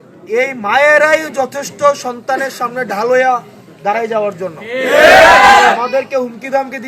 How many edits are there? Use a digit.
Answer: 0